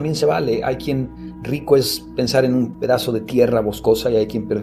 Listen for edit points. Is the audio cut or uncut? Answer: cut